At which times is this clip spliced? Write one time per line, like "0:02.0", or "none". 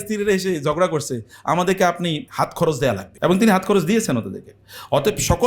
0:02.3
0:03.1